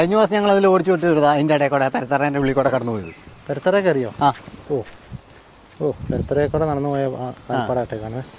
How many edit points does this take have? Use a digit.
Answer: 0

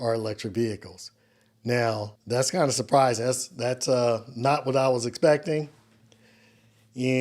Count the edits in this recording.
1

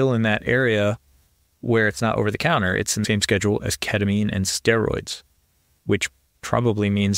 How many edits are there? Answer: 2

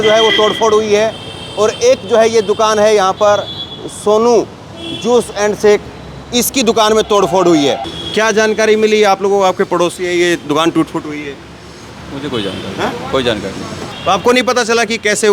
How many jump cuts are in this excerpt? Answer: 2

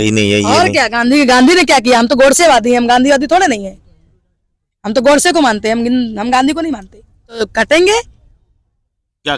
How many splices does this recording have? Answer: 1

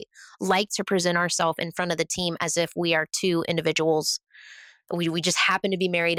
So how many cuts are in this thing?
0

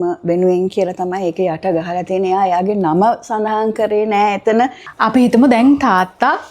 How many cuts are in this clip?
1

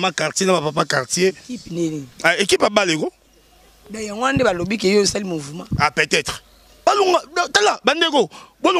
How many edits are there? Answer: 1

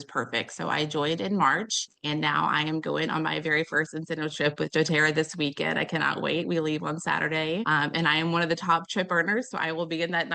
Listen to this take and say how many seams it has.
2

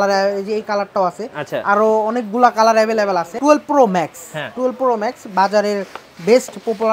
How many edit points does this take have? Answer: 1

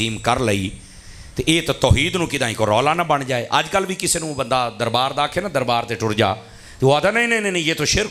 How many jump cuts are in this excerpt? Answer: 0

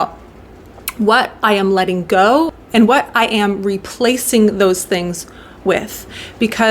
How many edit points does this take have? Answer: 1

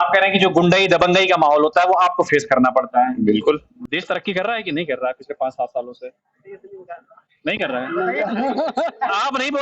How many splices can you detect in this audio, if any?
1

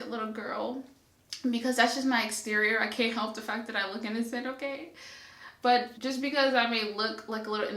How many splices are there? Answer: 1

